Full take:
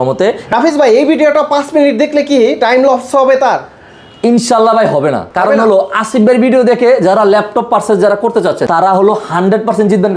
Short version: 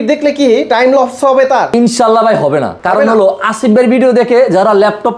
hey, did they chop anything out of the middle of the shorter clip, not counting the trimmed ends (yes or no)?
yes